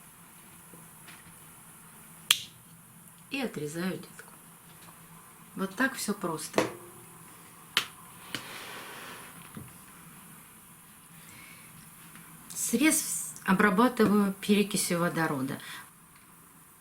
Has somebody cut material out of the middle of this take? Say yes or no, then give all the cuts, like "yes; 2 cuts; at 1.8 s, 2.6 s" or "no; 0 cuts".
yes; 1 cut; at 15.7 s